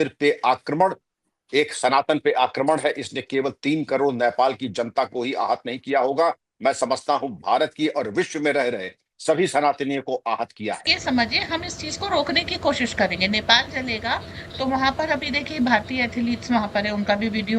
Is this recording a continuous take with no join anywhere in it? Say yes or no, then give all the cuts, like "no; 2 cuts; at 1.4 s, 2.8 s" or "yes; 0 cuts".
no; 1 cut; at 11.0 s